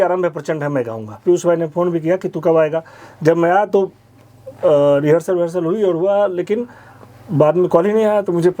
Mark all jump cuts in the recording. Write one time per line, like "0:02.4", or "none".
0:01.2